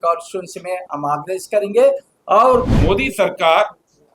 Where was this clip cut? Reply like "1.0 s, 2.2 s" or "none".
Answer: 2.7 s